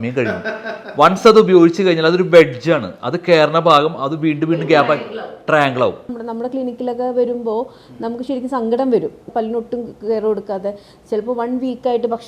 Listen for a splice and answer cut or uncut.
cut